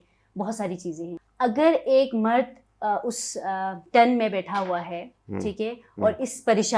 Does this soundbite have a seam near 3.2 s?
no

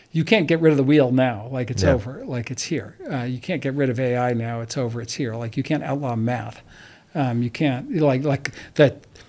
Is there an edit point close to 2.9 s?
no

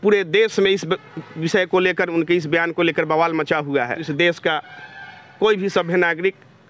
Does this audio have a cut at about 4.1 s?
yes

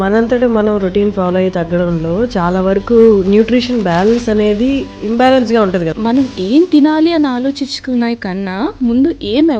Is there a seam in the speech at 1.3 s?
no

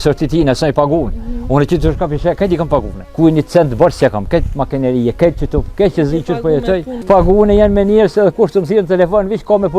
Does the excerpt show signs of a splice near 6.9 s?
yes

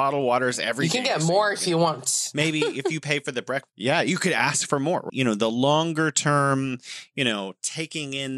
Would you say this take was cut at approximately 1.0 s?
no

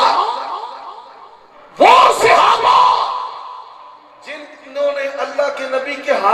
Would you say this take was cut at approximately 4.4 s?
no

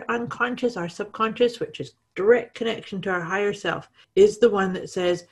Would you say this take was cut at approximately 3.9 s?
yes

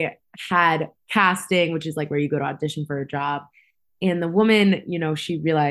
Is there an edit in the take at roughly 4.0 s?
no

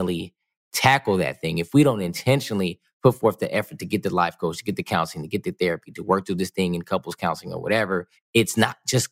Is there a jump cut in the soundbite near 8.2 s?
yes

